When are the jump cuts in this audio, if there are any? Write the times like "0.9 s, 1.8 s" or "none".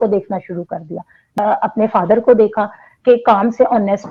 1.2 s